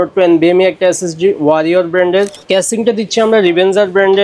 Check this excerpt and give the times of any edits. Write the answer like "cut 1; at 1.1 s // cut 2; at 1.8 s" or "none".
cut 1; at 2.4 s